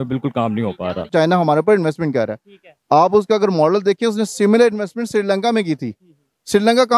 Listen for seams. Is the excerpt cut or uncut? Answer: cut